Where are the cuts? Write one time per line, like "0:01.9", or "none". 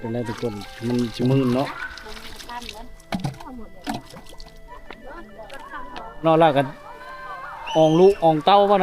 0:06.2